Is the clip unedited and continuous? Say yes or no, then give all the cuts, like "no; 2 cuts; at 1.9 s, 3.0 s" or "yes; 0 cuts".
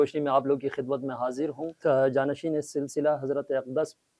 no; 1 cut; at 1.7 s